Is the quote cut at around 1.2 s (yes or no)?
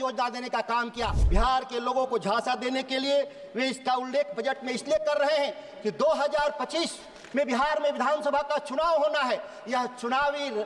yes